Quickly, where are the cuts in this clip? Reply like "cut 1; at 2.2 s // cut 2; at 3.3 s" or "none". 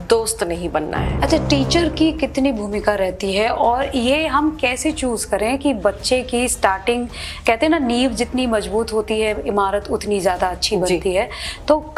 cut 1; at 1.0 s